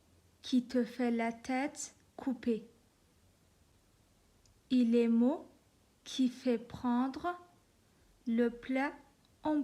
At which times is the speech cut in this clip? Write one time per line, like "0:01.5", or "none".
0:03.7